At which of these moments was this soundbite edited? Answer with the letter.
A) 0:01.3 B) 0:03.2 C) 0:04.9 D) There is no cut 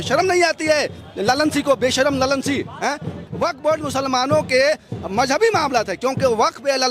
B